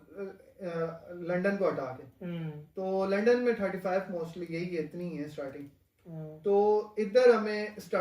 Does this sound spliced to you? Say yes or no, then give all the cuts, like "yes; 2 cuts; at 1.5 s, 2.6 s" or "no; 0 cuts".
no; 0 cuts